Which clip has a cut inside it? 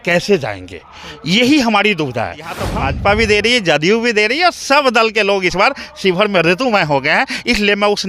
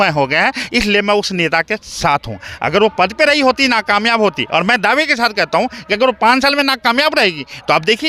first; 1 cut; at 2.6 s

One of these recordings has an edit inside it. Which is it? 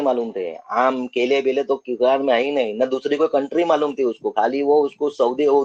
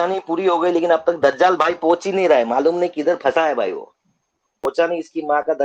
second; 1 cut; at 4.6 s

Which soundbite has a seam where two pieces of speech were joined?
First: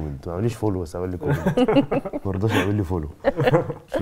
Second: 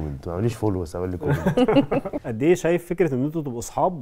second; 1 cut; at 2.2 s

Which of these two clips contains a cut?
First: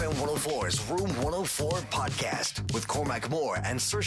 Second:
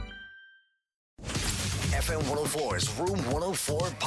second; 1 cut; at 1.2 s

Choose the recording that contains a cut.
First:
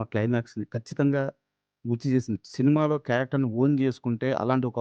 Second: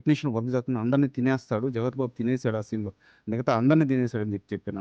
first; 1 cut; at 2.4 s

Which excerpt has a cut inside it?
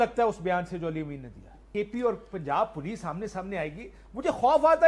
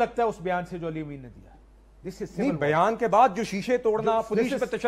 first; 1 cut; at 1.6 s

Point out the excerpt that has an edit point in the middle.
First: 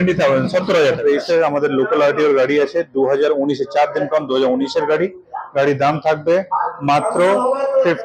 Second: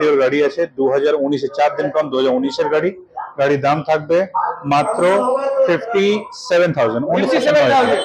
first; 1 cut; at 1.0 s

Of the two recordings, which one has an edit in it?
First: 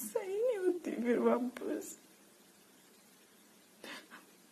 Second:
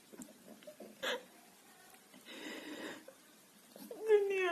second; 1 cut; at 0.9 s

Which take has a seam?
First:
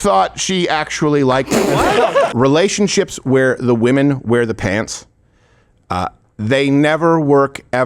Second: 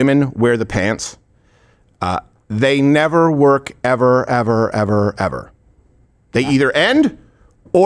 first; 1 cut; at 2.3 s

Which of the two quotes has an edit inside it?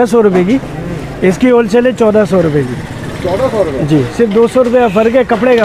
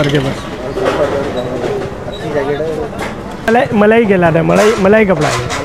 second; 1 cut; at 3.5 s

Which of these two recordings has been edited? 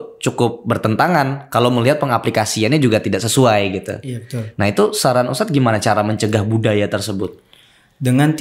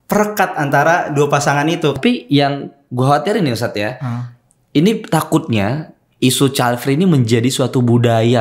second; 1 cut; at 2.0 s

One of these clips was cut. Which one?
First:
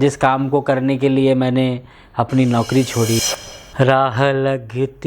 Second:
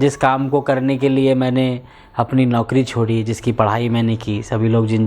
first; 1 cut; at 3.2 s

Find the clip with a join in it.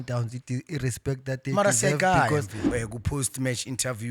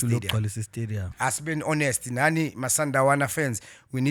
first; 1 cut; at 2.6 s

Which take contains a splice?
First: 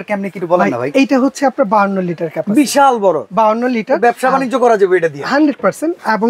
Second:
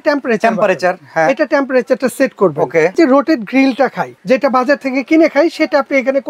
second; 2 cuts; at 2.9 s, 4.1 s

